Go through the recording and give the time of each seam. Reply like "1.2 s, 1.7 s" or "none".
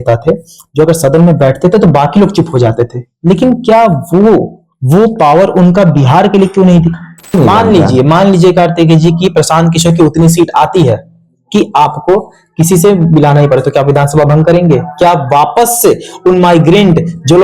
7.3 s